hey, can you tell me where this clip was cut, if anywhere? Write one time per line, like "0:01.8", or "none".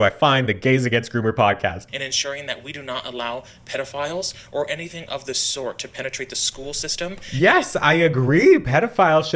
0:01.8